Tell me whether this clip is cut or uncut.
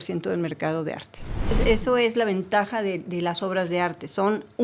cut